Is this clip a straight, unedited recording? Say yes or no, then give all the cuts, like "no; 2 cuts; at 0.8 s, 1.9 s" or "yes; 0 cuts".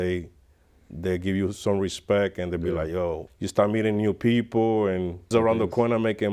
no; 2 cuts; at 3.3 s, 5.3 s